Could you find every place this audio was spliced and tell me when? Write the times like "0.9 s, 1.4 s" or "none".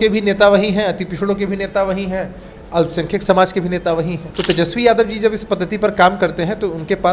4.2 s